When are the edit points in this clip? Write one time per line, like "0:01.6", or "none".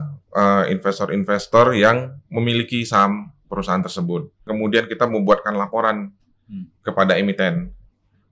0:04.5